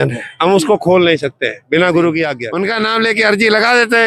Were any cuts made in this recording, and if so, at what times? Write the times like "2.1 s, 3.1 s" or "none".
2.4 s